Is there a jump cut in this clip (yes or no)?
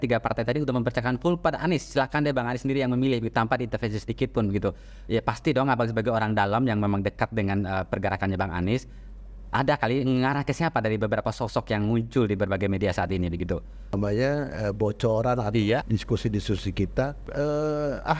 yes